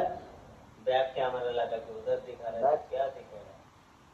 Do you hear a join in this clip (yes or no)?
no